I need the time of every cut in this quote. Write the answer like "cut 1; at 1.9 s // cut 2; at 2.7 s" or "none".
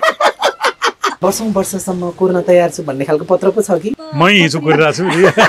cut 1; at 1.1 s // cut 2; at 3.9 s